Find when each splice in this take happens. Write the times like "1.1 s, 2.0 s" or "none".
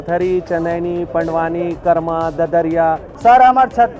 3.1 s